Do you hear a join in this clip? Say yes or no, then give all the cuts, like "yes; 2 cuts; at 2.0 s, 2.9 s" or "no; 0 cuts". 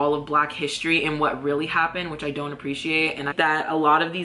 yes; 1 cut; at 3.3 s